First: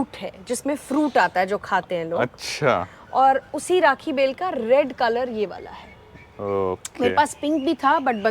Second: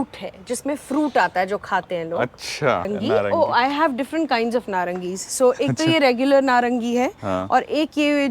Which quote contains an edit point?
second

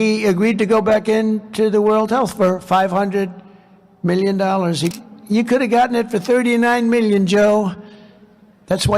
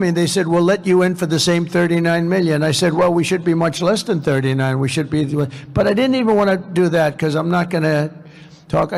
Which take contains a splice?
first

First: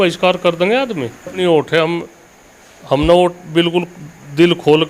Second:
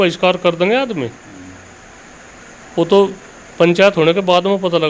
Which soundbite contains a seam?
first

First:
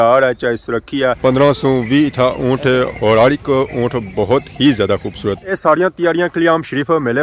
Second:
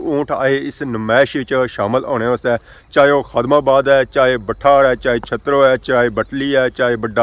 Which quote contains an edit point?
first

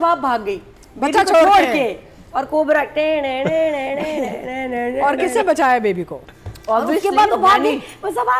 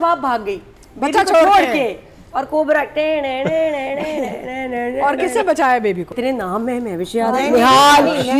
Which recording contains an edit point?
second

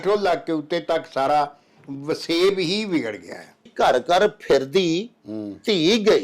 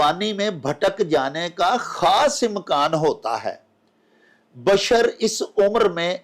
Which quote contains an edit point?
first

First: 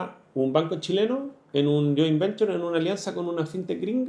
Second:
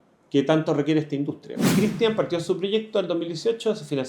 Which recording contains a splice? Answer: second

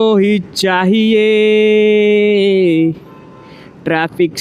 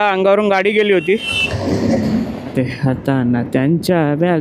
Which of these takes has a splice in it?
second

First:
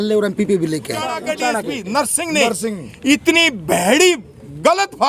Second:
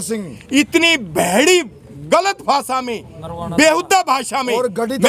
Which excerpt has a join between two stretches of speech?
first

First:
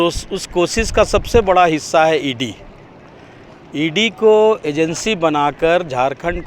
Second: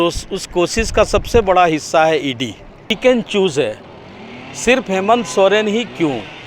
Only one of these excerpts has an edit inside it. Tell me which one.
second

